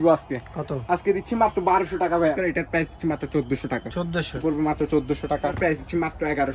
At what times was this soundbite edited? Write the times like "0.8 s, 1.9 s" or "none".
2.4 s, 4.4 s, 5.6 s